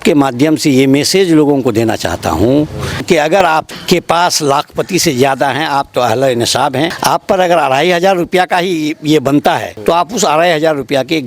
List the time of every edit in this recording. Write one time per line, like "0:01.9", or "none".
0:03.3
0:07.0
0:09.7